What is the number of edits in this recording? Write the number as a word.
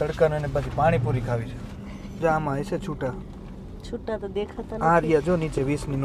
zero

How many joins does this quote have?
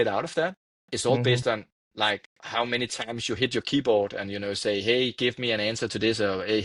zero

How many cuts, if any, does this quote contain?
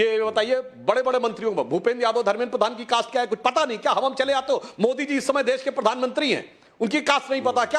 zero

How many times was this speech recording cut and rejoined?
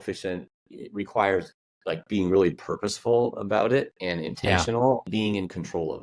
one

